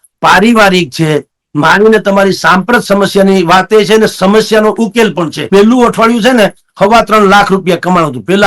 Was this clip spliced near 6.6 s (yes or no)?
no